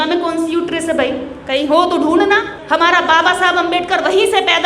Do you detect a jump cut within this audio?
yes; 1 cut; at 2.6 s

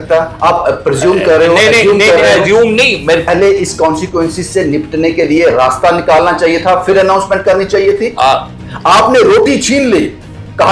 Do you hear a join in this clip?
yes; 1 cut; at 3.3 s

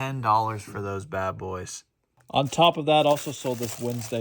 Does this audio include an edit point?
no; 0 cuts

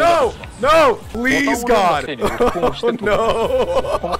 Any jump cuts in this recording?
yes; 2 cuts; at 1.1 s, 2.1 s

